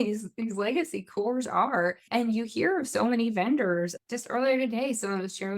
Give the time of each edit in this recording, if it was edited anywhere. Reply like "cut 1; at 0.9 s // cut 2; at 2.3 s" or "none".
cut 1; at 2.0 s // cut 2; at 3.9 s